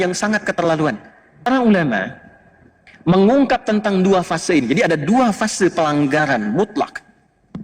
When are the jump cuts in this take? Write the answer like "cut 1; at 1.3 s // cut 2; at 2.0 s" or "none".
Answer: cut 1; at 1.4 s